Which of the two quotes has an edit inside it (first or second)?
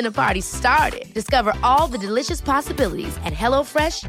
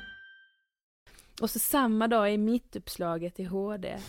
second